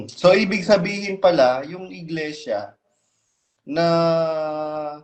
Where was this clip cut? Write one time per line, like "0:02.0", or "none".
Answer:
none